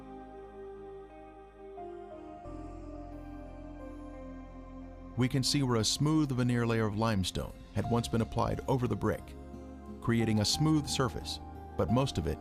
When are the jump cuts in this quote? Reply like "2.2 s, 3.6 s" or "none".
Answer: 5.3 s